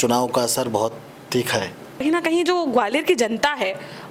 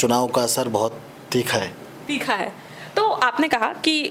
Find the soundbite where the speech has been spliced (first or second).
first